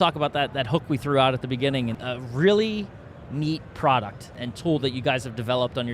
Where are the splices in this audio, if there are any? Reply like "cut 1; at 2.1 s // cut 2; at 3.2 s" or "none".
cut 1; at 2.0 s // cut 2; at 4.3 s